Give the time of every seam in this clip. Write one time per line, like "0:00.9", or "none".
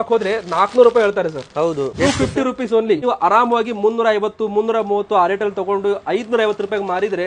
0:01.9
0:03.0